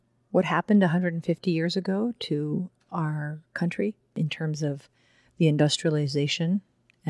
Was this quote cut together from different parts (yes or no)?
no